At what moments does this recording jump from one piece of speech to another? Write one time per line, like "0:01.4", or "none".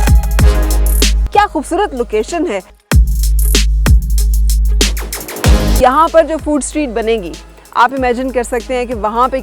0:01.2
0:02.7
0:05.8